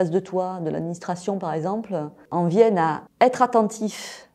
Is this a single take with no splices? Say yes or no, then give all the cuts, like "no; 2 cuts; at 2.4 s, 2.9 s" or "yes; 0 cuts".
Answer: no; 2 cuts; at 2.2 s, 3.0 s